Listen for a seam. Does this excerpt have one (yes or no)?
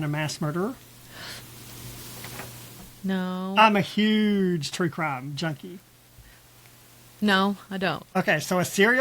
yes